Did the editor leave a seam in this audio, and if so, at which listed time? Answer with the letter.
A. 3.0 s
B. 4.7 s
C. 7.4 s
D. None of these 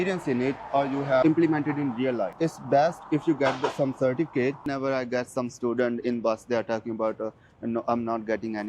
B